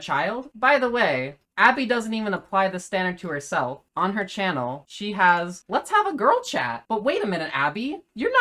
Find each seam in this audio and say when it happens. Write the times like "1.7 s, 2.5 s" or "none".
none

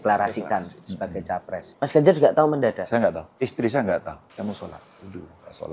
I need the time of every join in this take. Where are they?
1.7 s, 3.3 s, 4.2 s

